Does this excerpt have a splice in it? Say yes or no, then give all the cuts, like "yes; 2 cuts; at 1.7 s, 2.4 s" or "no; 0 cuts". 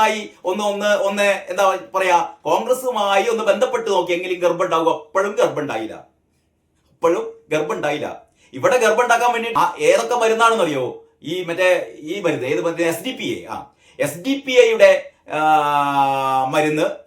yes; 1 cut; at 9.4 s